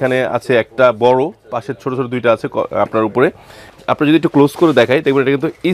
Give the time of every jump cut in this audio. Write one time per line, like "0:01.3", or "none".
0:03.6